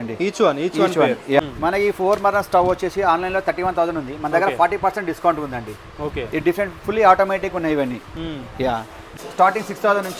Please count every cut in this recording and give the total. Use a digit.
2